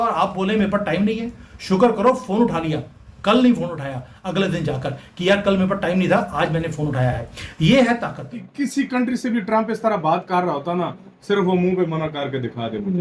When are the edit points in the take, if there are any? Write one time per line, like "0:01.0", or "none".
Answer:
0:08.4